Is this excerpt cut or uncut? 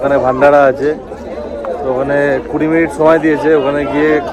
uncut